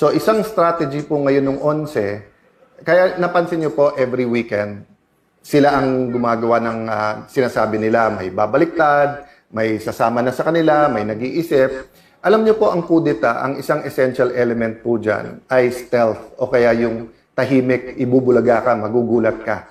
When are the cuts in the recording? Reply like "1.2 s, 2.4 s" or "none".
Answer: none